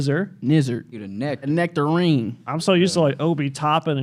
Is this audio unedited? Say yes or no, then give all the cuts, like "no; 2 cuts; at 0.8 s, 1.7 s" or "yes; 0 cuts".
no; 1 cut; at 1.4 s